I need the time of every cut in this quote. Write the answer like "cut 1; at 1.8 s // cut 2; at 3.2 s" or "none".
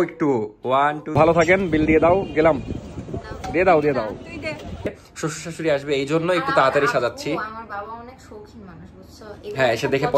cut 1; at 1.2 s // cut 2; at 4.9 s